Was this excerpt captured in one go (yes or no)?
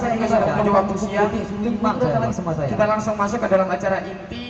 yes